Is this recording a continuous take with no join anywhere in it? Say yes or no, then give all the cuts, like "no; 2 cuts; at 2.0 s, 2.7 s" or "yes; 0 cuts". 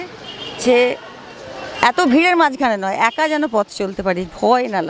yes; 0 cuts